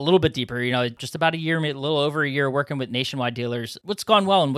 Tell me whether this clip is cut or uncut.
cut